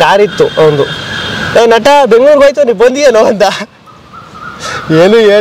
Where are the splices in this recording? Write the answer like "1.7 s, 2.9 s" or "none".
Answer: none